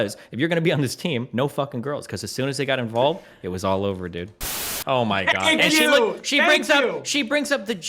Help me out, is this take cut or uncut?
cut